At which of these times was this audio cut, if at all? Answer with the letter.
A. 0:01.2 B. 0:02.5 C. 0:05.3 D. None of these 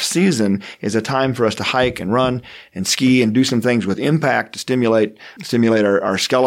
C